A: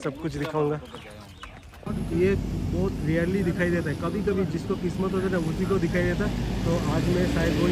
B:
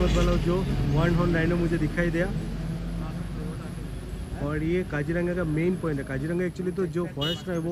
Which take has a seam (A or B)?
A